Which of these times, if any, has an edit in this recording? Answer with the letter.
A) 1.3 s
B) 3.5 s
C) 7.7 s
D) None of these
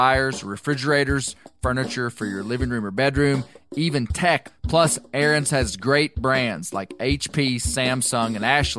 D